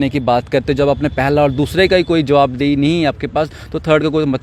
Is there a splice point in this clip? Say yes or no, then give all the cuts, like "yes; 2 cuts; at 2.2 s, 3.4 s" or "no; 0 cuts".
no; 0 cuts